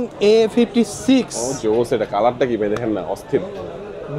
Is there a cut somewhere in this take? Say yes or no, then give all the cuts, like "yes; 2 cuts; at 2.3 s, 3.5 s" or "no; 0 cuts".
no; 0 cuts